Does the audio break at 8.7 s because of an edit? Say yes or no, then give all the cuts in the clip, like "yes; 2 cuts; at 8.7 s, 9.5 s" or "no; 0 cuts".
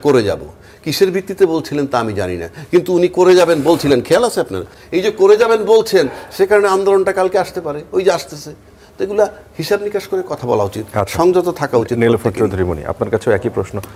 no; 0 cuts